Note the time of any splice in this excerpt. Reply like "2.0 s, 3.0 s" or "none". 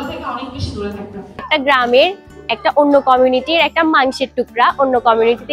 1.5 s